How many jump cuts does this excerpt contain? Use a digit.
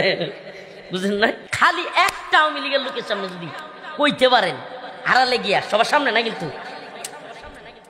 1